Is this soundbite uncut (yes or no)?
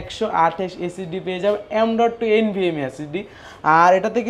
yes